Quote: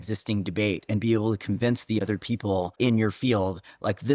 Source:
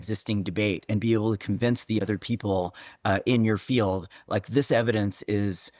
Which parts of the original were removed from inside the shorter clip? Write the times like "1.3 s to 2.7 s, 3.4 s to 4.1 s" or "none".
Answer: 2.8 s to 3.2 s